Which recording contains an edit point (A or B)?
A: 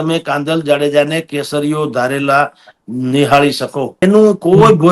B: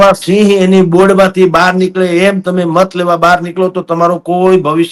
A